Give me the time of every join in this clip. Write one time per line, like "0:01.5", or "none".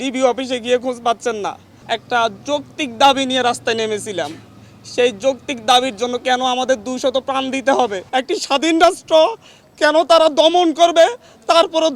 0:01.7
0:08.0